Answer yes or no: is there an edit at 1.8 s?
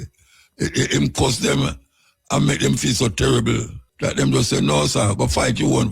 no